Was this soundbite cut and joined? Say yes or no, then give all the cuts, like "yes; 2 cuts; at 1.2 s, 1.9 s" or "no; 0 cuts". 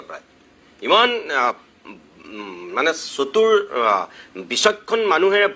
no; 0 cuts